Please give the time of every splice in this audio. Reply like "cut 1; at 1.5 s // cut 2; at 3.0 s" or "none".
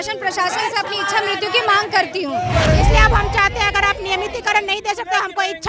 cut 1; at 2.5 s